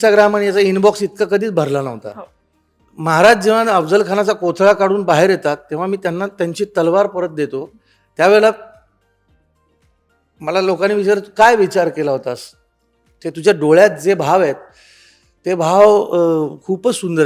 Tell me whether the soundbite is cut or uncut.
uncut